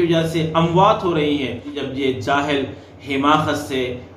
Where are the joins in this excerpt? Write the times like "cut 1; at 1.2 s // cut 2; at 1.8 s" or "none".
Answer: cut 1; at 1.8 s